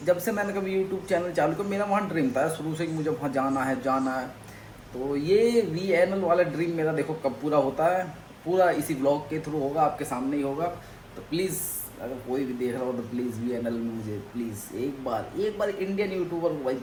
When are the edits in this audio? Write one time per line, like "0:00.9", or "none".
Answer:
none